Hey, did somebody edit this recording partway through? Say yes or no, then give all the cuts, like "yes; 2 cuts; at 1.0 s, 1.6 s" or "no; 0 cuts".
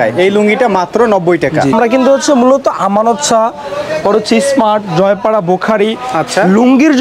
yes; 1 cut; at 1.7 s